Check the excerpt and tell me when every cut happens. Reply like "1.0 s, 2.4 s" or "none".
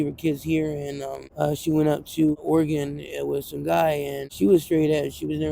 1.2 s, 2.4 s, 4.2 s